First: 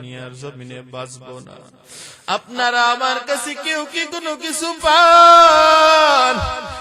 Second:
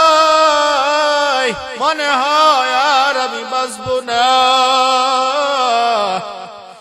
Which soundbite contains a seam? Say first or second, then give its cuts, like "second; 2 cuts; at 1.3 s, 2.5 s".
second; 1 cut; at 1.7 s